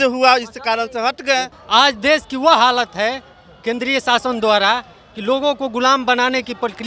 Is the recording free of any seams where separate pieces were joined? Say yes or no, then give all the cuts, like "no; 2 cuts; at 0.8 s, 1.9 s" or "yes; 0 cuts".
no; 1 cut; at 1.5 s